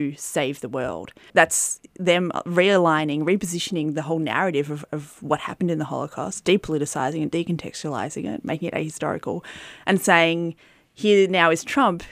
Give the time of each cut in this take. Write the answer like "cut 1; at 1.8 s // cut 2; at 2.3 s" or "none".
cut 1; at 1.3 s

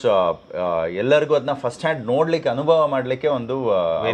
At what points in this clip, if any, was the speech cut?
none

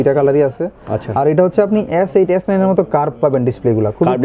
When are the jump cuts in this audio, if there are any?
none

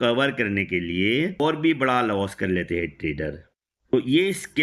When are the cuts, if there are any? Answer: cut 1; at 1.4 s // cut 2; at 3.9 s

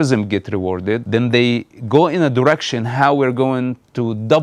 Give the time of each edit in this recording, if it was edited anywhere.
cut 1; at 1.0 s

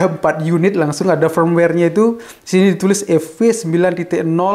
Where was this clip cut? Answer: none

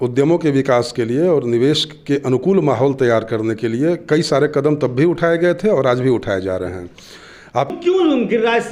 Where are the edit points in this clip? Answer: cut 1; at 7.7 s

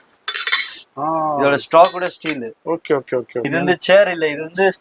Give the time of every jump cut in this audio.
cut 1; at 3.5 s

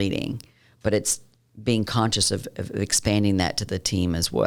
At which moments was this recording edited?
none

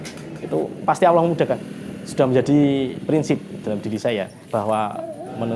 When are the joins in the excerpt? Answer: cut 1; at 1.6 s

